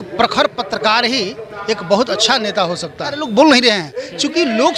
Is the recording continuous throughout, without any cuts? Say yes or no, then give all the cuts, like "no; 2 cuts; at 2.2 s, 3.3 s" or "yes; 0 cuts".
no; 1 cut; at 3.2 s